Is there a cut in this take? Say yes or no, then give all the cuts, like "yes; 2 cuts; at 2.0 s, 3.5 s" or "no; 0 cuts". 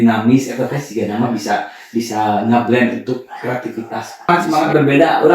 yes; 1 cut; at 4.3 s